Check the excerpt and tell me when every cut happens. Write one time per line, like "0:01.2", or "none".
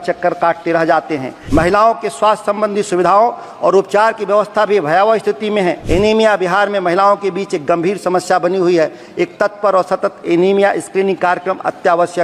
0:01.3
0:05.8